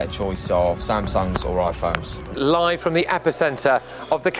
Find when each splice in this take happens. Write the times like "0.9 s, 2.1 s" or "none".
2.2 s